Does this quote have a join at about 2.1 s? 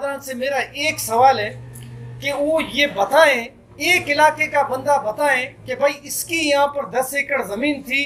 no; 0 cuts

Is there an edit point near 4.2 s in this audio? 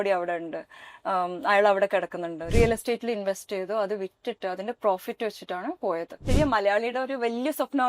no; 2 cuts; at 2.5 s, 6.2 s

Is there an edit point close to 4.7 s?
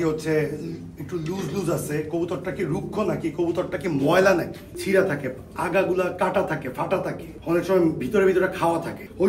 yes; 1 cut; at 4.7 s

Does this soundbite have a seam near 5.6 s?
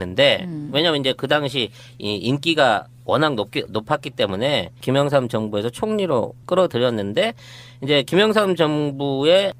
no; 0 cuts

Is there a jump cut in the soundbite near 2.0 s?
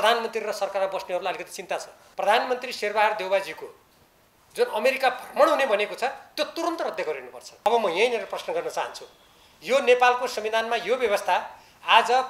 yes; 2 cuts; at 2.0 s, 7.7 s

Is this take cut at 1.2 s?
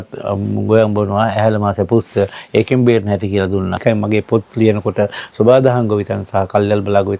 no; 1 cut; at 3.8 s

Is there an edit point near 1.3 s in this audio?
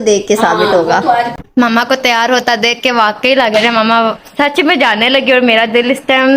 yes; 1 cut; at 1.3 s

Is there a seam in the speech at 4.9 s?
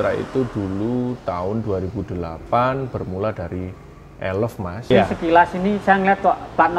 yes; 1 cut; at 4.9 s

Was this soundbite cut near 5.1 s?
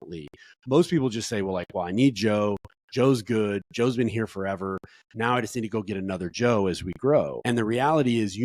no; 1 cut; at 7.4 s

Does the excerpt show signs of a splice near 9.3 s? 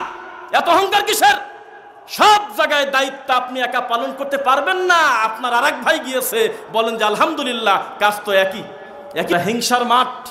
yes; 1 cut; at 9.3 s

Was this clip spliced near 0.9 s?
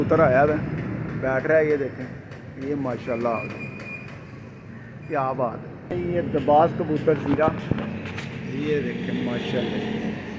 no; 1 cut; at 5.9 s

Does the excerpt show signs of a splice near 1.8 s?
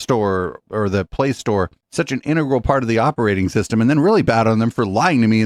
no; 0 cuts

